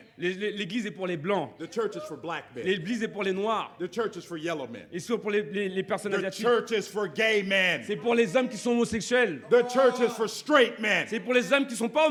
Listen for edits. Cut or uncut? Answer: uncut